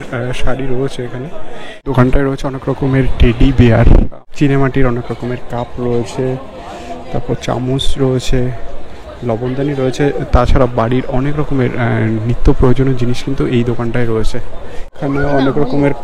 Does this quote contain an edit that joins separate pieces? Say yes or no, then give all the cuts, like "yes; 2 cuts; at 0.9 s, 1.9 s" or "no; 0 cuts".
yes; 3 cuts; at 1.8 s, 4.2 s, 14.9 s